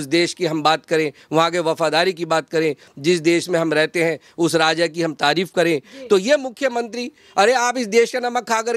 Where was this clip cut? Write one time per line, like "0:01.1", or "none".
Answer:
none